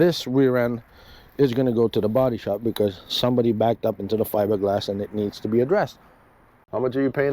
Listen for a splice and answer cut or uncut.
cut